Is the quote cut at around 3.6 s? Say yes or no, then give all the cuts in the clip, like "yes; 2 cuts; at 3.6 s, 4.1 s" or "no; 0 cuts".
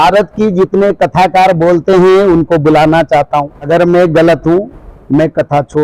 yes; 1 cut; at 3.6 s